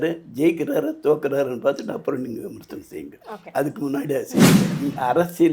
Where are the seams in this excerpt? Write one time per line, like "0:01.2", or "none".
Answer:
0:04.6